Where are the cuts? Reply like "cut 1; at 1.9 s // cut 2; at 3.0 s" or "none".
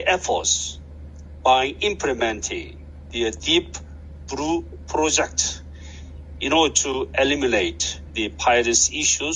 none